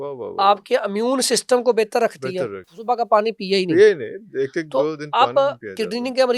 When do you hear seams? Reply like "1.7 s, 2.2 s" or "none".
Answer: 2.7 s